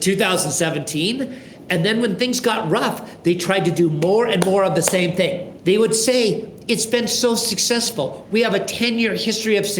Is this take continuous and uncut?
no; 1 cut; at 5.5 s

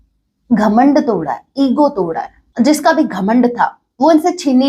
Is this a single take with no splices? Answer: no; 1 cut; at 2.4 s

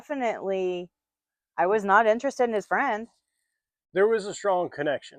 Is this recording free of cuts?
yes; 0 cuts

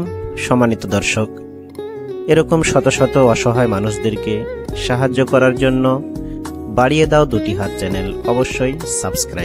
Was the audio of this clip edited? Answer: no; 0 cuts

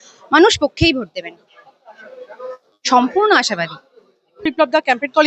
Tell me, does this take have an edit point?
no; 0 cuts

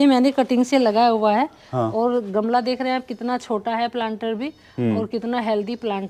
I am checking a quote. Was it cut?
no; 0 cuts

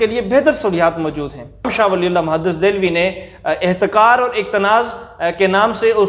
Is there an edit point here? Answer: yes; 1 cut; at 1.7 s

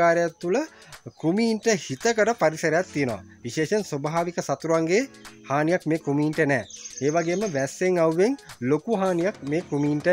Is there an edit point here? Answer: no; 0 cuts

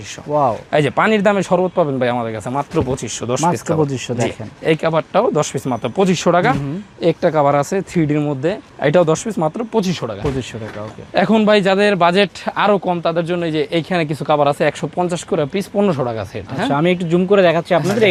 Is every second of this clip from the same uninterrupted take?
yes; 0 cuts

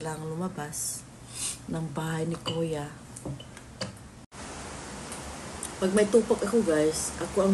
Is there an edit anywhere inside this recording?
yes; 1 cut; at 4.2 s

